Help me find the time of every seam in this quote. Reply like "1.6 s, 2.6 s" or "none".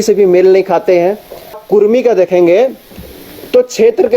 1.6 s